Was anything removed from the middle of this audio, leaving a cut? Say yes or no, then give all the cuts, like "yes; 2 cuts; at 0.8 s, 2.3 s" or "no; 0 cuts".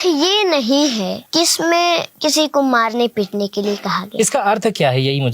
yes; 2 cuts; at 1.2 s, 2.1 s